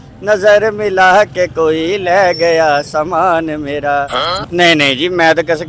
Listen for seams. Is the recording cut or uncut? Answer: cut